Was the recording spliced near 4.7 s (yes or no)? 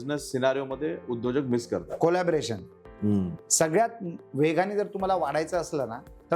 no